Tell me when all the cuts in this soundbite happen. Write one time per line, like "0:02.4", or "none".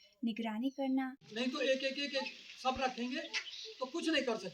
0:01.2